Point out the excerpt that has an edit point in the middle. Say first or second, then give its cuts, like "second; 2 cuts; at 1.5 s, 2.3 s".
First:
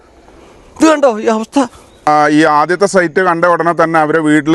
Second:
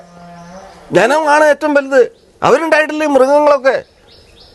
first; 1 cut; at 2.1 s